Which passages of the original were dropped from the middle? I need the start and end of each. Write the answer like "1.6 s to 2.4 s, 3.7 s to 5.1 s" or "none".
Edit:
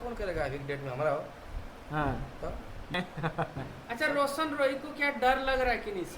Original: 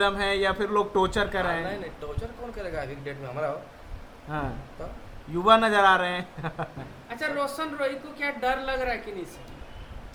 5.3 s to 6.1 s